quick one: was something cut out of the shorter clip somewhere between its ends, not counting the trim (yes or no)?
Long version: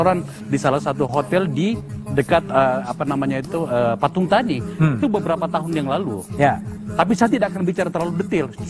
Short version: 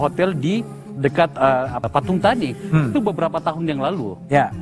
yes